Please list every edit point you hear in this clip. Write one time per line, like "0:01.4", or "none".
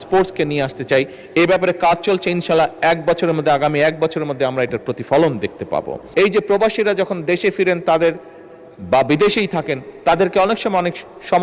0:06.0